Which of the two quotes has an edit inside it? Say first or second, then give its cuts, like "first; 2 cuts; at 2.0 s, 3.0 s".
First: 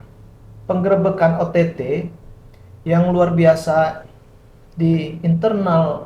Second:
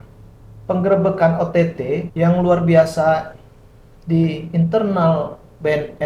second; 1 cut; at 2.1 s